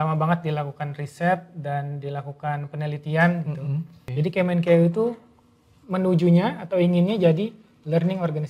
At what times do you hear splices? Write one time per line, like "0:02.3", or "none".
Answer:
0:04.0